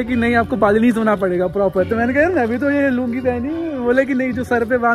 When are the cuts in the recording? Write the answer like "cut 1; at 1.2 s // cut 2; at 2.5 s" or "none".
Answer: none